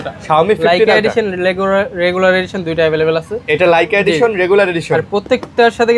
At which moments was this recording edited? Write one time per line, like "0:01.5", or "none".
none